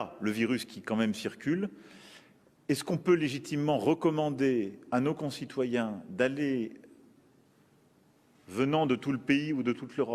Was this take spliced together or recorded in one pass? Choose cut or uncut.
uncut